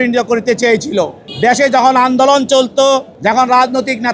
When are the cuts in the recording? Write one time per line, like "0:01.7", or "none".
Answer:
0:01.2
0:03.1

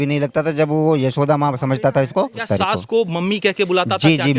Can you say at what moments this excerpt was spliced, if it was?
0:02.4

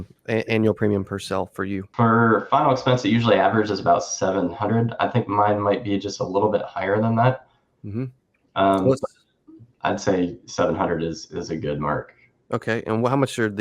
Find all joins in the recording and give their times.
0:01.8

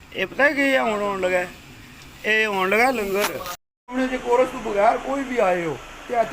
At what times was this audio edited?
0:03.9

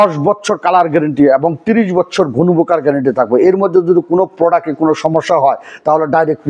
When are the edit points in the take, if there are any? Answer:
none

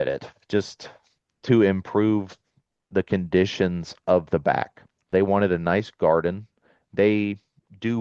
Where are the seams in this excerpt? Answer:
0:05.1

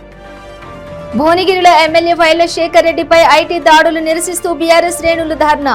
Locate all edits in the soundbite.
0:01.0

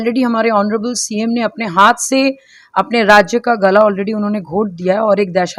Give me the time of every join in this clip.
none

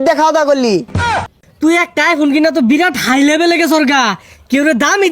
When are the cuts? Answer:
0:01.0

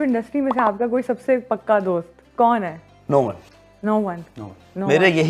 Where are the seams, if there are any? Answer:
none

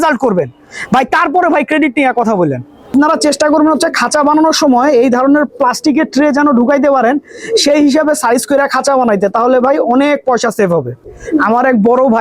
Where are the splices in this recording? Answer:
0:02.9
0:11.0

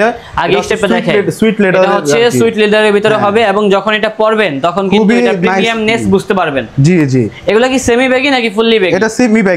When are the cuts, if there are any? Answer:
none

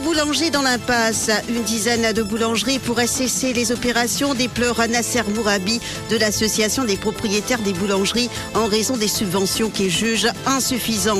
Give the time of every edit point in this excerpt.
none

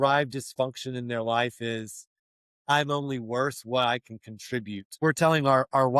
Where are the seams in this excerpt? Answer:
0:05.0

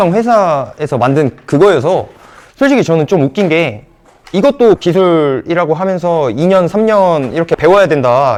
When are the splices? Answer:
none

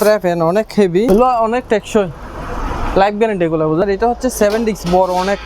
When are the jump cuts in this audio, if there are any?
0:01.1
0:03.8

